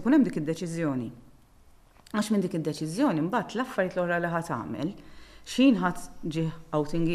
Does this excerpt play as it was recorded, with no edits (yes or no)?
yes